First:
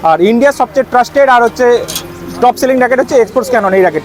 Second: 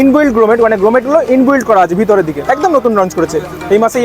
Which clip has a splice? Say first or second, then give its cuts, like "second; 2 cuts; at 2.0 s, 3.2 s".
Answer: second; 1 cut; at 2.4 s